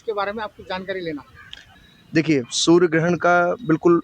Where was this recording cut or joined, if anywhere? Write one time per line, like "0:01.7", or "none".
0:01.6